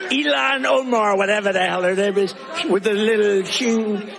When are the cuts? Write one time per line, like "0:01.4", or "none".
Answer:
0:02.5